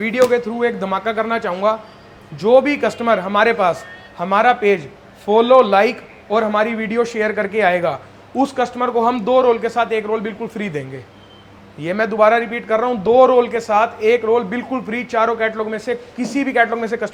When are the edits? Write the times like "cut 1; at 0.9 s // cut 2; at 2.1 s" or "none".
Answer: none